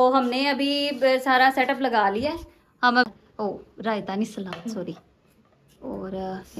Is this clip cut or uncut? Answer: cut